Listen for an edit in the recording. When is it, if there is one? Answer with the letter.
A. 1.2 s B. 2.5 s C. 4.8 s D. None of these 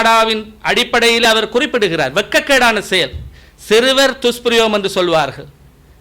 A